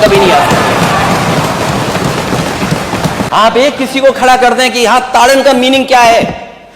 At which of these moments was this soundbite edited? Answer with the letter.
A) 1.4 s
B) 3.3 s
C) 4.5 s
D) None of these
B